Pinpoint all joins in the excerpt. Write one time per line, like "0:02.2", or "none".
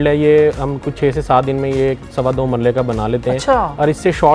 none